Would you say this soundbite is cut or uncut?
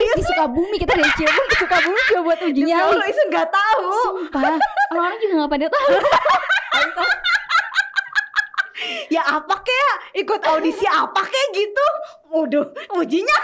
uncut